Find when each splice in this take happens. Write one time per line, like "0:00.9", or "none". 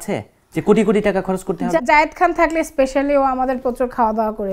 0:01.7